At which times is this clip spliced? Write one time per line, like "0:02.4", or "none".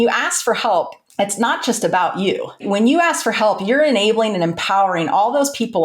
0:01.0
0:02.6

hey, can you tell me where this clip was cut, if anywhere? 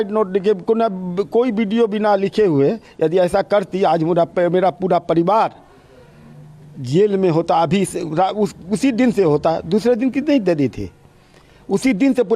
none

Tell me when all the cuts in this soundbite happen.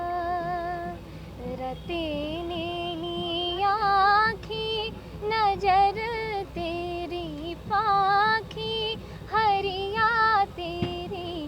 none

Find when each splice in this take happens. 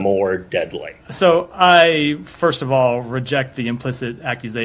0:01.5

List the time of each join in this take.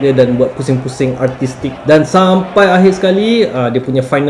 0:01.8

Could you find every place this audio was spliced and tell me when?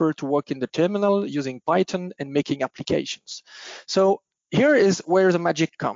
none

